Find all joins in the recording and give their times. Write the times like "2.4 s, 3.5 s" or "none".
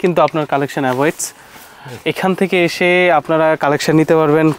none